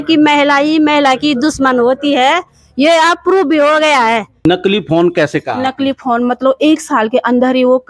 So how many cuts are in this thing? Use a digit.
1